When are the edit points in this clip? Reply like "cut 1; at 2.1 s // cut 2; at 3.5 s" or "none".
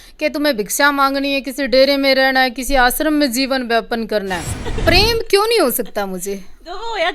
cut 1; at 4.7 s